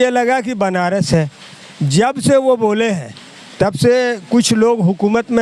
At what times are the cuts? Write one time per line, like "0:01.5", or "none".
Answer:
none